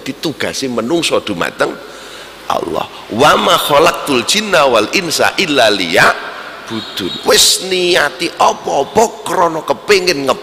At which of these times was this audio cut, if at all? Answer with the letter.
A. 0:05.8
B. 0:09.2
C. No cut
C